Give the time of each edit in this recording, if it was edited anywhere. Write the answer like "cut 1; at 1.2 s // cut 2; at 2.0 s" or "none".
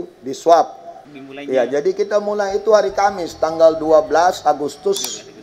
cut 1; at 1.0 s